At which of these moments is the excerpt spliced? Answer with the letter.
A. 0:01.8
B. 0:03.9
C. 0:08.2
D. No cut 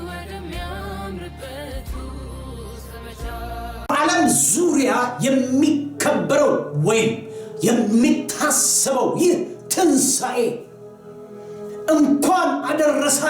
B